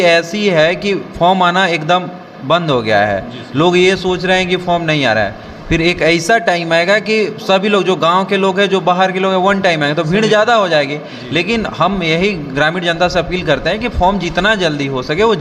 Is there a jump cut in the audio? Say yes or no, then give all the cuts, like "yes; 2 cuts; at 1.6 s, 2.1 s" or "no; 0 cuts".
no; 0 cuts